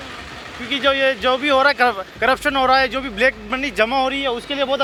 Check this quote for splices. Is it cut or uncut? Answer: uncut